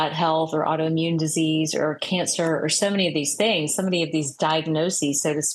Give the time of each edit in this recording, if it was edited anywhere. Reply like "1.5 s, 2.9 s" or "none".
none

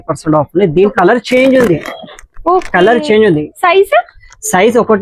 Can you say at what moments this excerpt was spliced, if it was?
0.9 s

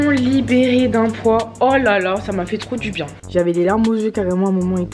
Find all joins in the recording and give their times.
3.1 s

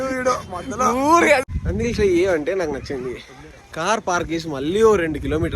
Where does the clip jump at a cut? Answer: 1.4 s

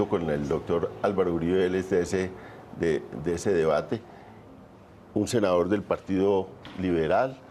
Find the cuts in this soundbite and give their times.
3.5 s

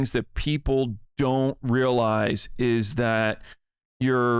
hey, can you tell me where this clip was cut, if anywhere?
none

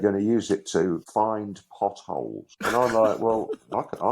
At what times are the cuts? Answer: 1.1 s, 2.5 s

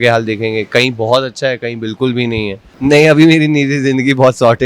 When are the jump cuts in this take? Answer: 2.7 s

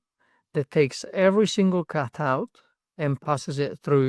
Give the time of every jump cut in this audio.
3.2 s

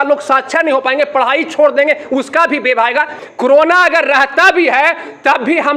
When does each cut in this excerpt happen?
3.2 s

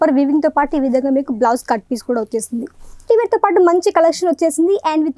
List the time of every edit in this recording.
3.0 s

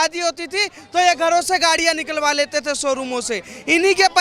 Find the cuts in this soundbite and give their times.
none

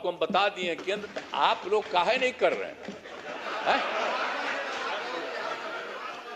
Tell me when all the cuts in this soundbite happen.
1.0 s

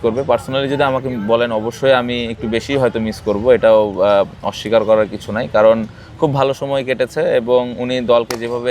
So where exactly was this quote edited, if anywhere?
none

